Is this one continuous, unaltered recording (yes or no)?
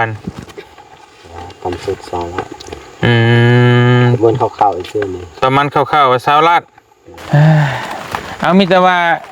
no